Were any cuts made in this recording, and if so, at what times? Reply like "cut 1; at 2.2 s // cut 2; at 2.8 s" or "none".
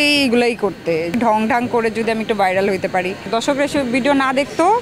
cut 1; at 1.1 s // cut 2; at 3.2 s